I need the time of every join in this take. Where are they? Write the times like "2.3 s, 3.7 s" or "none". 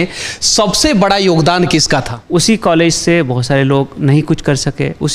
2.2 s